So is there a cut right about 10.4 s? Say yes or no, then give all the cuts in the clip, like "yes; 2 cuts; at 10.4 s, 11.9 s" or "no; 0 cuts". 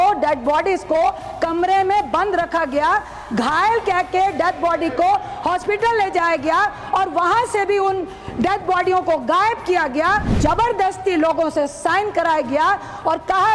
yes; 1 cut; at 10.4 s